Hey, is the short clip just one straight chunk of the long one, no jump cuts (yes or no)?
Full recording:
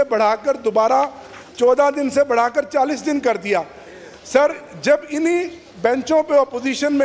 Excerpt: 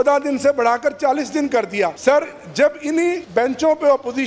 no